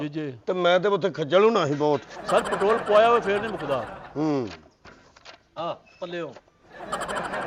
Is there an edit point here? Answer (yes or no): no